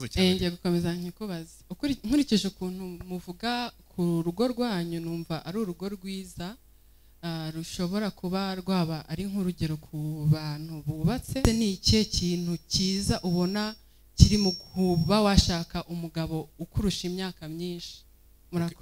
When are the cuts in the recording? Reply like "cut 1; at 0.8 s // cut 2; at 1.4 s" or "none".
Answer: cut 1; at 11.4 s

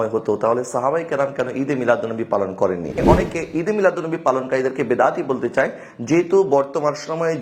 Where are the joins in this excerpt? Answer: cut 1; at 3.0 s

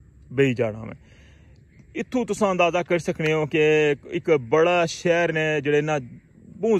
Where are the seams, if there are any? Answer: none

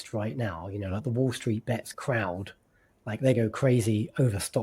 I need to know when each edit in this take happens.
cut 1; at 1.9 s

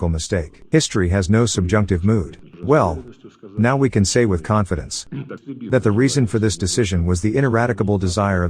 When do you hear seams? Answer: cut 1; at 2.5 s

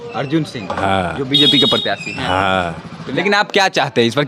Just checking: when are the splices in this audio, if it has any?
cut 1; at 3.0 s

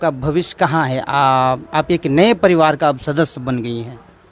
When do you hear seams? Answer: none

